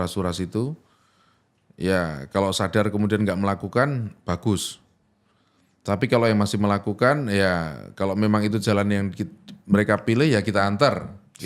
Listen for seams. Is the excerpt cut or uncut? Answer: uncut